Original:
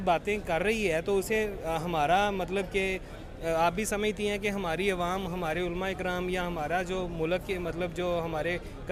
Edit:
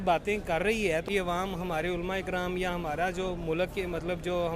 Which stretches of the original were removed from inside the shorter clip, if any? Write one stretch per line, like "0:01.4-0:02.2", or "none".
0:01.0-0:04.8